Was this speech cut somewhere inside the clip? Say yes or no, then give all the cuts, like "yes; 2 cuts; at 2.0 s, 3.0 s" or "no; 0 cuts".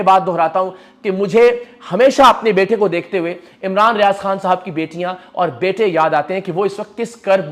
no; 0 cuts